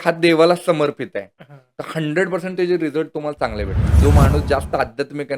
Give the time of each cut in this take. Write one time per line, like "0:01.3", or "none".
0:04.0